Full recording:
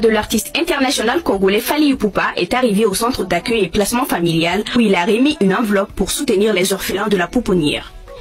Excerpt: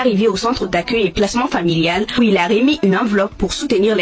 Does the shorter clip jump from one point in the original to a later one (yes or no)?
no